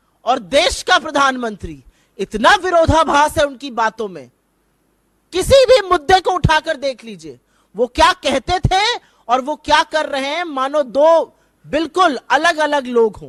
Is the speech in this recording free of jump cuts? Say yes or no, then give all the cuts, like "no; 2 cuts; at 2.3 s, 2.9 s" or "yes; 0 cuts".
yes; 0 cuts